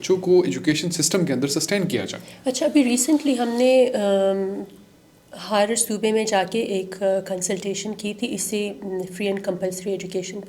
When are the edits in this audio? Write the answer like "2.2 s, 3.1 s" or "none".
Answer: none